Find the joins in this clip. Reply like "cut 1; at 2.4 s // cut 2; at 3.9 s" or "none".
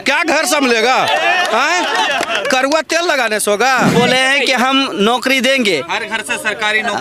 cut 1; at 3.9 s